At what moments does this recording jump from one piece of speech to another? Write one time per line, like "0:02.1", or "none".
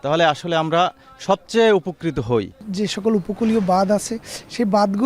none